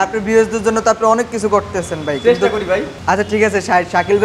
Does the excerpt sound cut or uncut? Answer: cut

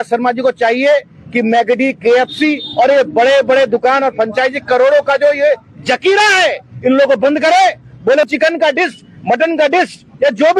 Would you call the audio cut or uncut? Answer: cut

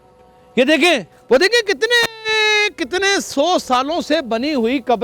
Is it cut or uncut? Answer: cut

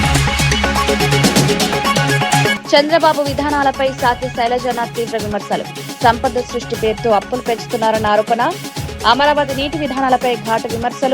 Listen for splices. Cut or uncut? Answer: uncut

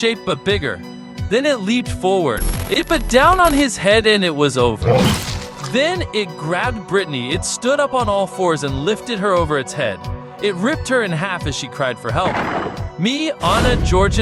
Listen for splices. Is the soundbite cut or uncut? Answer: cut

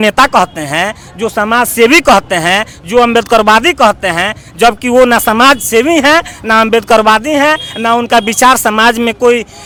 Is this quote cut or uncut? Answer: uncut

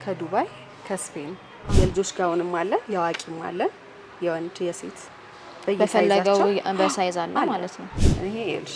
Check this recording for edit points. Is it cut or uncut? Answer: cut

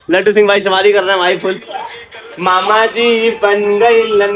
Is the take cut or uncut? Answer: uncut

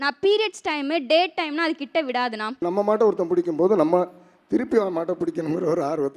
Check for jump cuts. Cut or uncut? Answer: cut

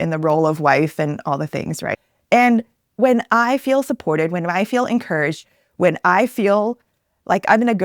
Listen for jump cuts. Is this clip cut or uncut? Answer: cut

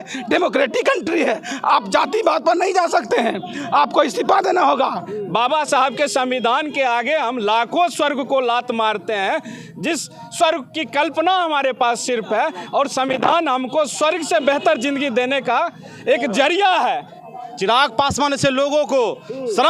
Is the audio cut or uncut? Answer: cut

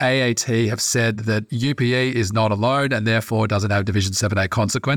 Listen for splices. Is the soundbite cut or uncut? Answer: cut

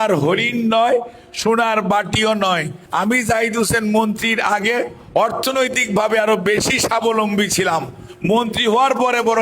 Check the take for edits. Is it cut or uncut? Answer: cut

